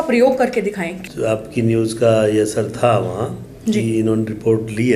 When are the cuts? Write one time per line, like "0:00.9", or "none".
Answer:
0:00.9